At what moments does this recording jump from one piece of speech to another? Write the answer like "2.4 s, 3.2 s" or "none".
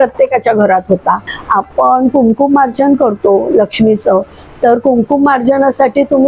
1.3 s